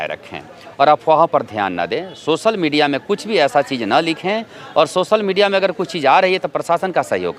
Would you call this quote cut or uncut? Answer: uncut